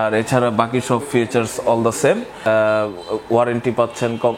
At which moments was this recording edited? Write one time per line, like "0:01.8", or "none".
0:02.5